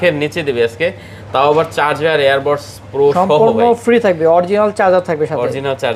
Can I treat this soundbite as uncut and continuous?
yes; 0 cuts

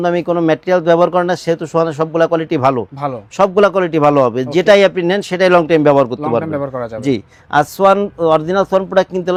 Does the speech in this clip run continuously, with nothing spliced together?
yes; 0 cuts

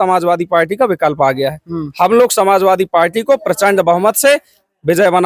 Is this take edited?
no; 0 cuts

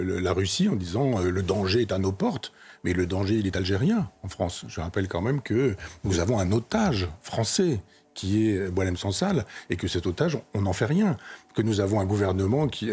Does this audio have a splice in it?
no; 0 cuts

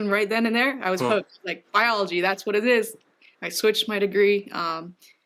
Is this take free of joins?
yes; 0 cuts

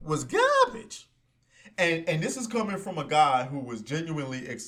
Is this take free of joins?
yes; 0 cuts

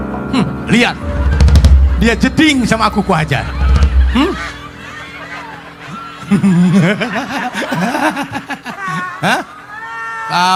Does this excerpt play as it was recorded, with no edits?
yes; 0 cuts

